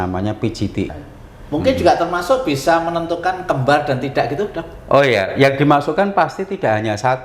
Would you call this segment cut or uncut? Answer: cut